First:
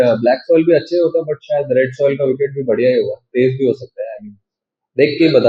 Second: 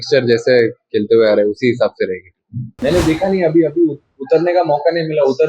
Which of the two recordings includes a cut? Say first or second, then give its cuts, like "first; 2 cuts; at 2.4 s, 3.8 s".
second; 1 cut; at 2.7 s